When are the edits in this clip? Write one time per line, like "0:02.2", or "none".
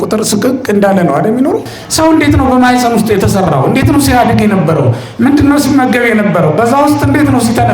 0:01.8